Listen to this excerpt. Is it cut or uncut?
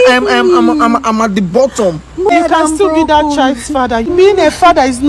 cut